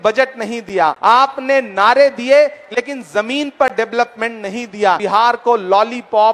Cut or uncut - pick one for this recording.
cut